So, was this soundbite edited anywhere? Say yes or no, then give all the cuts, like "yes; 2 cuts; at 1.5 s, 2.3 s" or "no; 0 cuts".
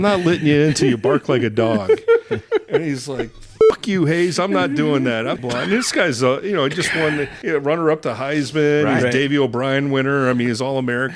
yes; 2 cuts; at 5.4 s, 7.3 s